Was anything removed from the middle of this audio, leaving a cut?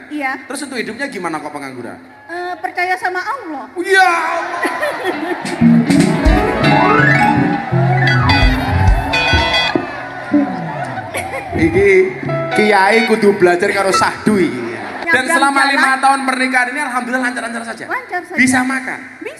yes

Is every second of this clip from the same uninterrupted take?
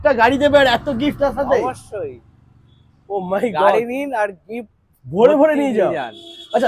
yes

